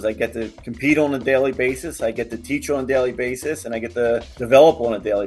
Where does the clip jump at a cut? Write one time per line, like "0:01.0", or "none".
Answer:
0:04.3